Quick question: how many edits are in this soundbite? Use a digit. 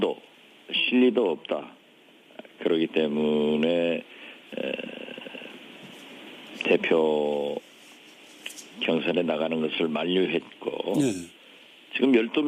0